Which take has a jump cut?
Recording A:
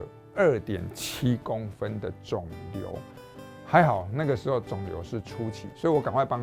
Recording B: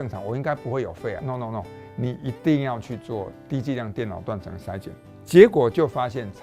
B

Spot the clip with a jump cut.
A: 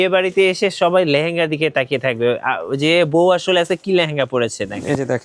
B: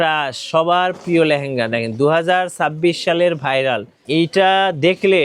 B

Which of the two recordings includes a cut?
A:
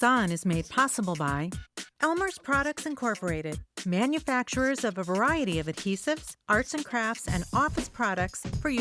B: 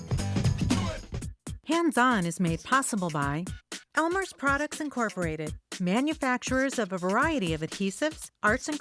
B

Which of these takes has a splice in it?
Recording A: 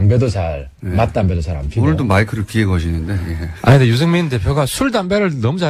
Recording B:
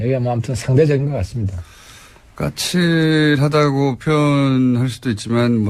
B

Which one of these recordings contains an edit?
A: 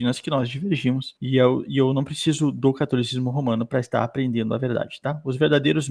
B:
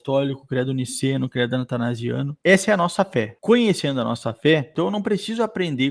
B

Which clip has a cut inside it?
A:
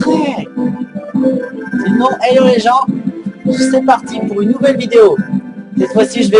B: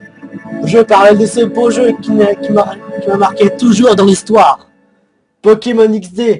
A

